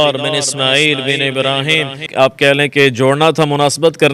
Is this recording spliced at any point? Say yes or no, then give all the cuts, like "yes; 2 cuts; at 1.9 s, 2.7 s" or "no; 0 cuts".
yes; 1 cut; at 2.1 s